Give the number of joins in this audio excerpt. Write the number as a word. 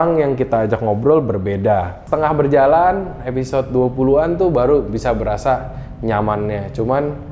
one